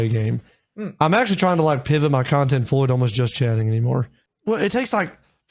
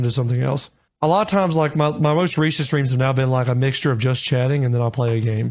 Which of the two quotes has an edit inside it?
first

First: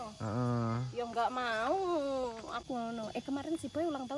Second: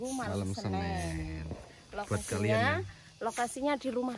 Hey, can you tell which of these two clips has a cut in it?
first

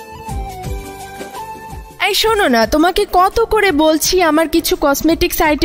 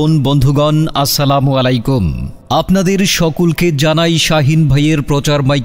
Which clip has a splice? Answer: first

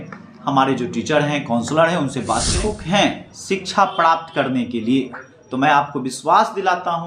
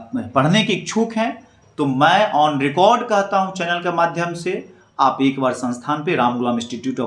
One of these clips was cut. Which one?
first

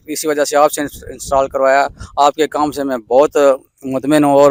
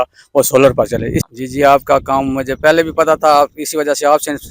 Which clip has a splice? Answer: second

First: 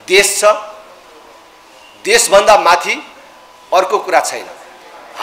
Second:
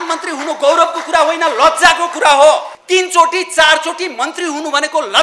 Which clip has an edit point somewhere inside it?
second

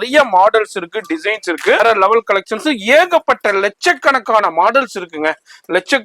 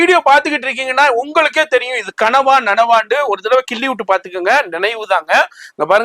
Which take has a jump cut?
first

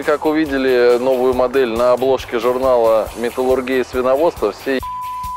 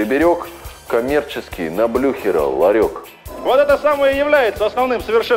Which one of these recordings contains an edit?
second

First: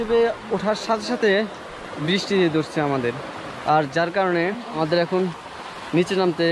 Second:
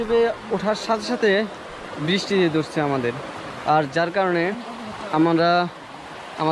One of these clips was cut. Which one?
first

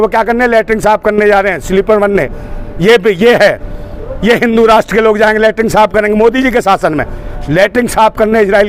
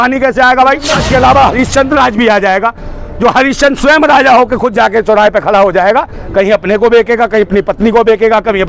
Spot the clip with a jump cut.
second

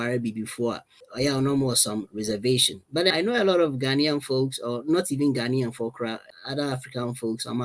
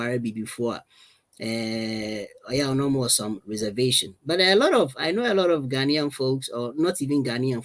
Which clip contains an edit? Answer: first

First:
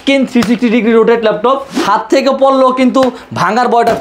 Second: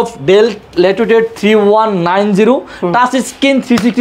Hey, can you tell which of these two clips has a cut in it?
first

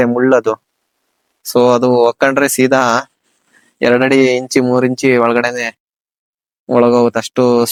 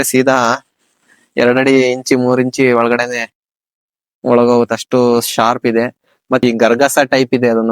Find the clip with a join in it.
second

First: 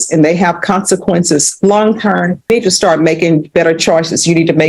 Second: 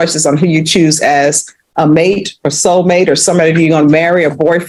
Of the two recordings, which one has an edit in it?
first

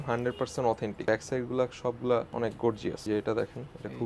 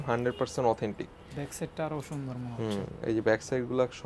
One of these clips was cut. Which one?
first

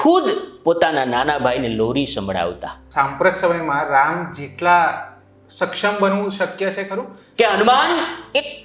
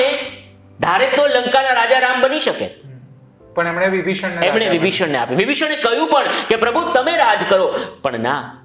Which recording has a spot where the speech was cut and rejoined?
first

